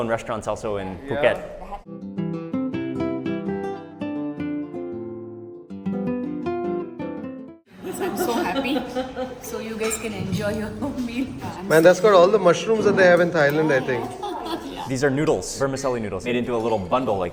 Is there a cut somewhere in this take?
yes; 3 cuts; at 1.8 s, 7.4 s, 14.8 s

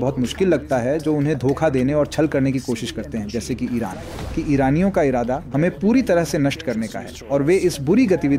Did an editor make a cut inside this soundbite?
yes; 1 cut; at 4.3 s

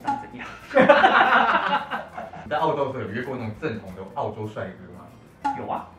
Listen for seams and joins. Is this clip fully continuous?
yes; 0 cuts

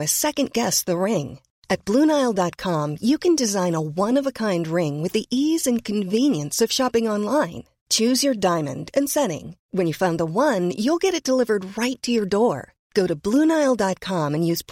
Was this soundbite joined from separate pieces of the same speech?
no; 0 cuts

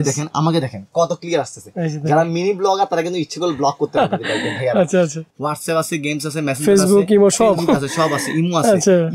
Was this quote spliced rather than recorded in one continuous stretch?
yes; 1 cut; at 5.2 s

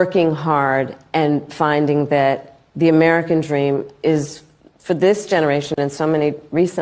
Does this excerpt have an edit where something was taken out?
yes; 1 cut; at 1.1 s

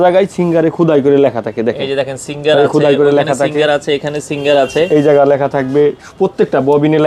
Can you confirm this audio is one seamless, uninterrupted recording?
yes; 0 cuts

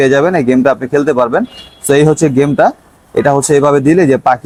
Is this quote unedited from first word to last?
yes; 0 cuts

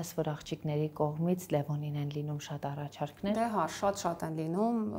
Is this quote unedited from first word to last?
yes; 0 cuts

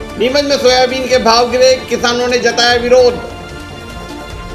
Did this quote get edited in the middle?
yes; 1 cut; at 3.2 s

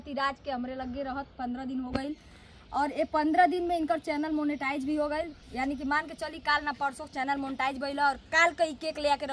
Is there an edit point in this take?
no; 0 cuts

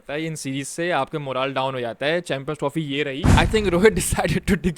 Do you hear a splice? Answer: yes; 1 cut; at 3.3 s

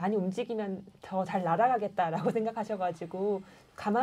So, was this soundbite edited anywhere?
no; 0 cuts

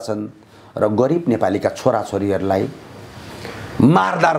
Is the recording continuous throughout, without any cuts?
yes; 0 cuts

